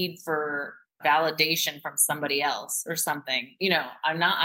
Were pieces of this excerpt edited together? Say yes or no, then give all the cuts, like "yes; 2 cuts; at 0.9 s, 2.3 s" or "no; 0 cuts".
no; 0 cuts